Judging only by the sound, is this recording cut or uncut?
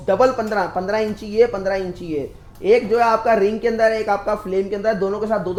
uncut